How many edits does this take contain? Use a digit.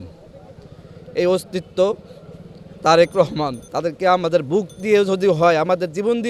1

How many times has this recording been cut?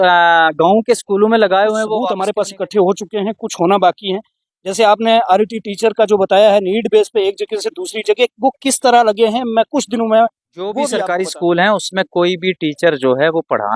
2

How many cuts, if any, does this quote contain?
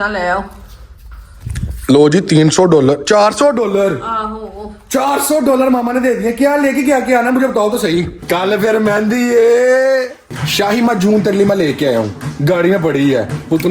3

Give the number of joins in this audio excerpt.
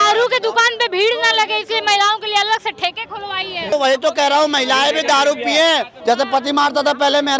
2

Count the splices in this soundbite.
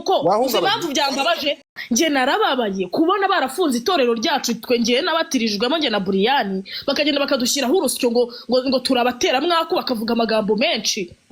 1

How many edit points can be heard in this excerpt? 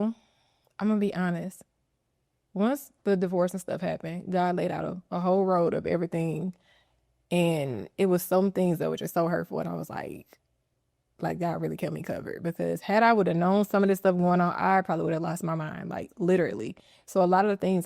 0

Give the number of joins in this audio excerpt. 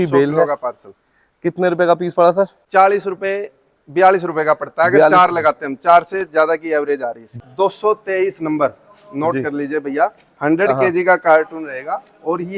2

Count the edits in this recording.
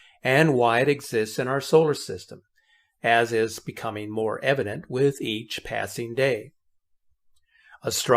1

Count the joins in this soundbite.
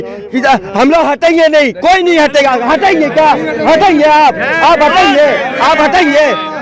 0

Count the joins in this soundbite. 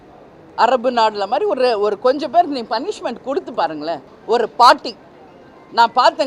1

